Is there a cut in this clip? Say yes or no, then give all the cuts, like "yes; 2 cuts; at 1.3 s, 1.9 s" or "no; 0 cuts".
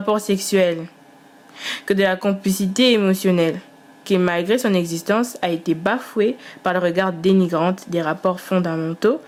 no; 0 cuts